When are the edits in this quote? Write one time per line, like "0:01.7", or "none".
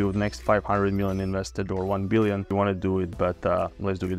0:02.5